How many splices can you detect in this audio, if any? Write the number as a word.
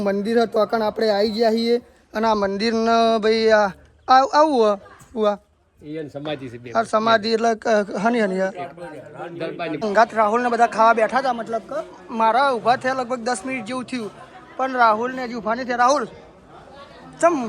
one